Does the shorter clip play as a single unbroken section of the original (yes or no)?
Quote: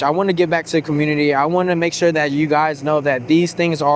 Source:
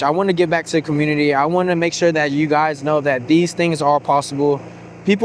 yes